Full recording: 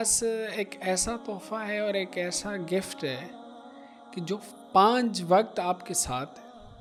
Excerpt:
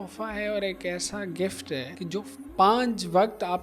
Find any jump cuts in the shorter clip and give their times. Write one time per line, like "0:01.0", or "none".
0:01.9